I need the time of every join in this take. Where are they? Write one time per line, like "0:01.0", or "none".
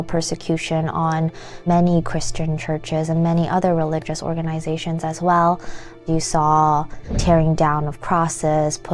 0:01.7
0:06.0
0:07.1